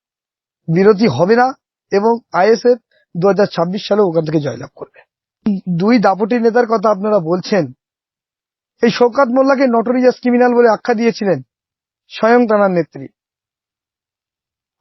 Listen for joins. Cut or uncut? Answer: cut